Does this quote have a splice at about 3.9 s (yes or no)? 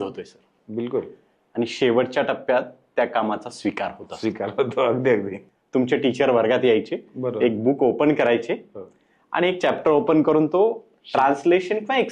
no